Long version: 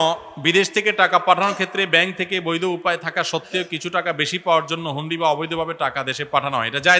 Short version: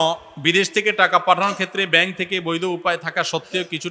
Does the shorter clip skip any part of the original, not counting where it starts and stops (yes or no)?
no